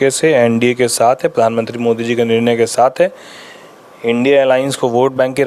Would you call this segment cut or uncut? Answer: uncut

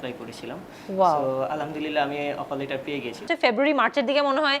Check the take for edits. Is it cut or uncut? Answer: cut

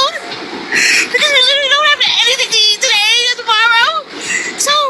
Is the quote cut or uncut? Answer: cut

